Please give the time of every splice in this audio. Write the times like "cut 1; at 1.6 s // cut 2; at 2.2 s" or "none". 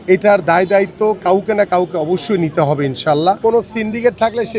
cut 1; at 3.4 s